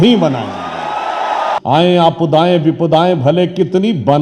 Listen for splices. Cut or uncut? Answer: cut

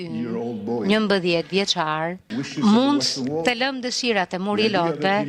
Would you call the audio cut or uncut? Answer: cut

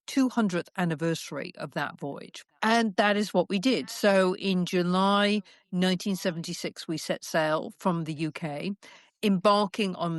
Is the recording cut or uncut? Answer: uncut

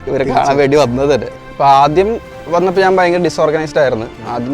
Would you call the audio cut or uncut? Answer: cut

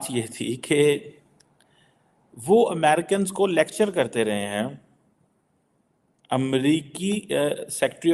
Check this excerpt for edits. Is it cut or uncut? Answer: uncut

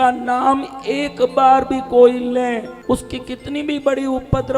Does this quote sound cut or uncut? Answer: cut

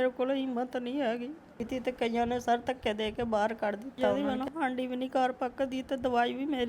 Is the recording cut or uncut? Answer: cut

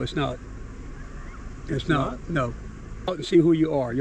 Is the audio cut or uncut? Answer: cut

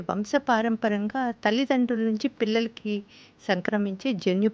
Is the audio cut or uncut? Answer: uncut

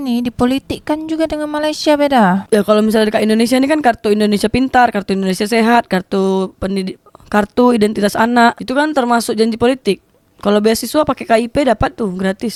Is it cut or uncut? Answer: uncut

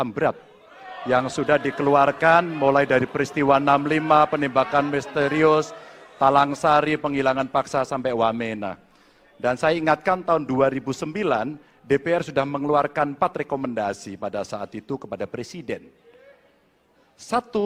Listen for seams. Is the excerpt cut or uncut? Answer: uncut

